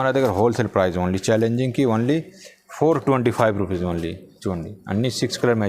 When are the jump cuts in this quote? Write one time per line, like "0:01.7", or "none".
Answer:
none

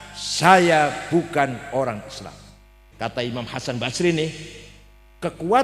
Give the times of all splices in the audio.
0:02.8

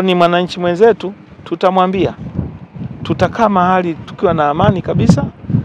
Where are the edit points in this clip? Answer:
none

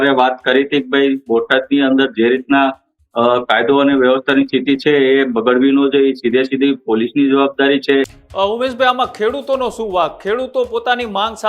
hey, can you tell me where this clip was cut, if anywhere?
0:08.1

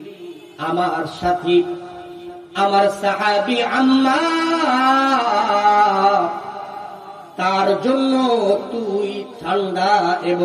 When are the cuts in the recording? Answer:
none

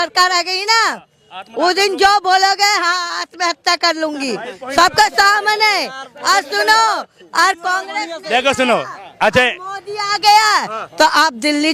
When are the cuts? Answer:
none

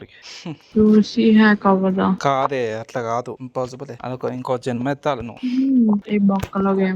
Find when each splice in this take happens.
0:06.0

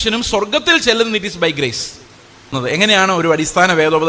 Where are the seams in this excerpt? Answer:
0:02.5

